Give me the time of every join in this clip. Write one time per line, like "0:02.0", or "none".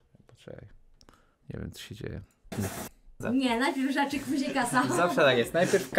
0:02.9